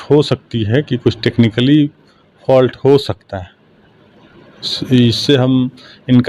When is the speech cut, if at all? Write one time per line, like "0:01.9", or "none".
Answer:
none